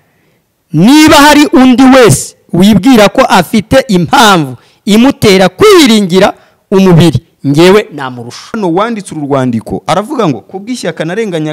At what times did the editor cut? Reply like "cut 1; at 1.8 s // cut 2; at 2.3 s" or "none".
cut 1; at 8.4 s